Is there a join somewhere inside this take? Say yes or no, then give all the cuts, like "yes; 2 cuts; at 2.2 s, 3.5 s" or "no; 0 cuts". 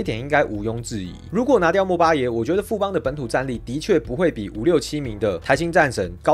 no; 0 cuts